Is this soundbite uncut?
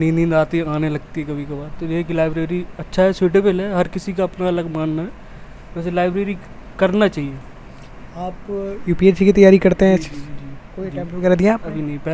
yes; 0 cuts

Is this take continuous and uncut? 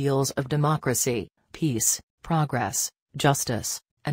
yes; 0 cuts

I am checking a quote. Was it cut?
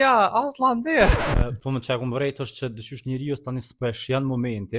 yes; 1 cut; at 1.3 s

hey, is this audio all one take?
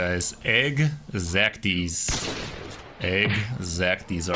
yes; 0 cuts

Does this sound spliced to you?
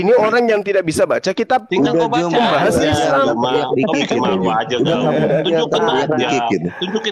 no; 0 cuts

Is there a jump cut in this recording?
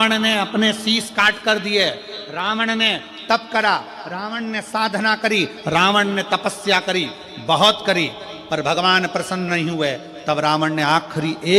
no; 0 cuts

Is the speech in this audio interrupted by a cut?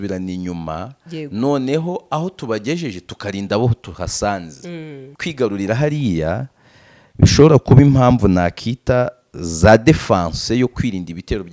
yes; 1 cut; at 5.0 s

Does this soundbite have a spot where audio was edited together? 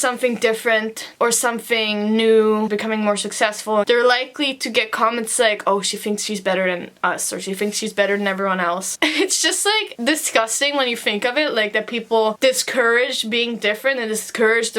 yes; 3 cuts; at 2.7 s, 3.9 s, 8.9 s

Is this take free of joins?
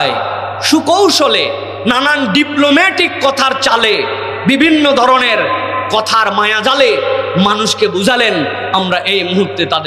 yes; 0 cuts

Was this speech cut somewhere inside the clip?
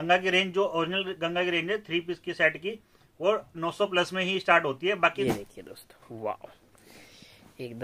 yes; 1 cut; at 5.2 s

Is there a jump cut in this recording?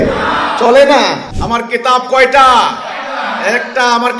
yes; 1 cut; at 1.2 s

